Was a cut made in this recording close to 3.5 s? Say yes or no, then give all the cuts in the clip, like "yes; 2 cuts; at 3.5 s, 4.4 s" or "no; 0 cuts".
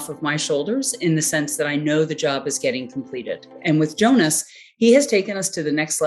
yes; 1 cut; at 3.5 s